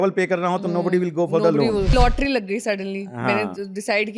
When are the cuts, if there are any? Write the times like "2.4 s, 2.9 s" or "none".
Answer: 1.9 s